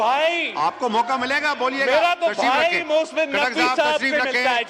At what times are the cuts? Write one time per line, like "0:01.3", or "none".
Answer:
none